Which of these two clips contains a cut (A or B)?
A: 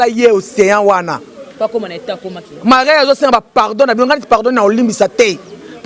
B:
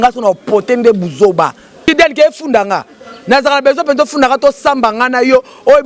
B